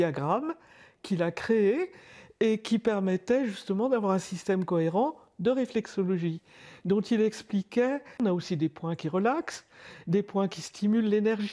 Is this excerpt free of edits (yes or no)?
no